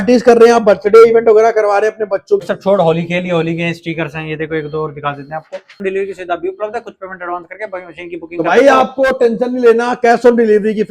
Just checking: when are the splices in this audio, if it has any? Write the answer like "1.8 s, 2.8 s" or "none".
2.4 s, 5.8 s